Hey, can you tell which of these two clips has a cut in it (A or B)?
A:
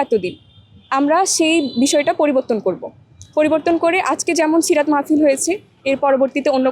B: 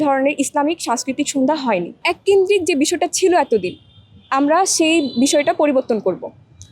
B